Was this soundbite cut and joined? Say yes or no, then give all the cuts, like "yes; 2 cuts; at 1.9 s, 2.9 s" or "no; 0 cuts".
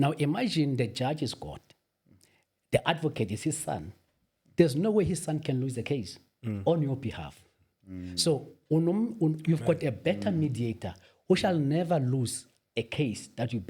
no; 0 cuts